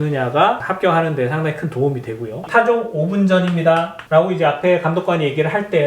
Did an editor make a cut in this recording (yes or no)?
yes